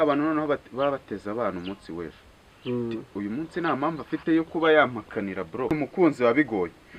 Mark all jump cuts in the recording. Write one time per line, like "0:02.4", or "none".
0:05.7